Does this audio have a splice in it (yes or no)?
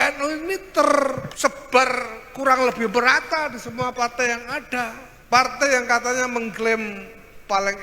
yes